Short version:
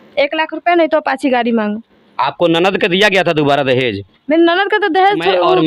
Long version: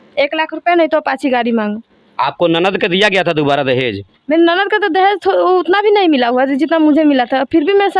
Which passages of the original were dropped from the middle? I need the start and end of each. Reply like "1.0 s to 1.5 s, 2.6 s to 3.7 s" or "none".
none

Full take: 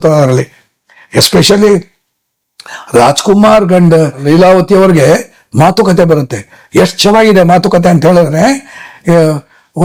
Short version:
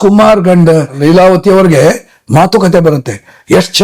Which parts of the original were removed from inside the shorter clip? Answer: none

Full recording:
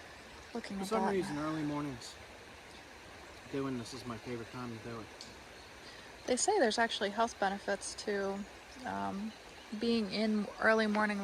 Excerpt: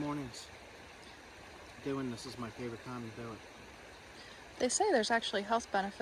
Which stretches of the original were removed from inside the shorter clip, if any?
none

